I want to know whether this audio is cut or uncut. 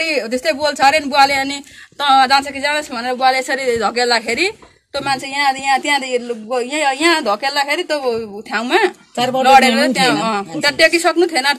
uncut